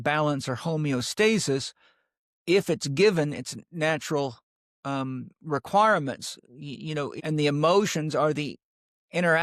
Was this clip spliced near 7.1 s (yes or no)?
yes